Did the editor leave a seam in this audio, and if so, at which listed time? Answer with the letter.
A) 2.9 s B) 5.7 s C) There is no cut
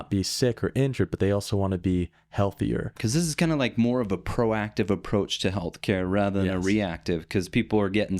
A